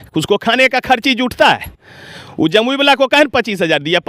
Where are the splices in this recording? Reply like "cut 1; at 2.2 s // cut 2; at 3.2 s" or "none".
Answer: none